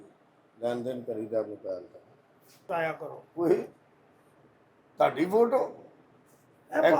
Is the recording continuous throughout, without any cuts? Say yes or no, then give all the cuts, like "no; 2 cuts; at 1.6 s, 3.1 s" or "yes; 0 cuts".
no; 1 cut; at 2.7 s